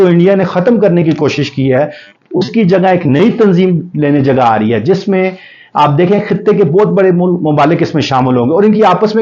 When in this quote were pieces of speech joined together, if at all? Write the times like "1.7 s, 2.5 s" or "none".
none